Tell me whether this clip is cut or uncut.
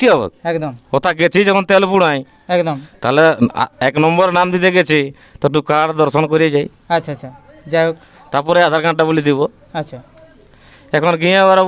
uncut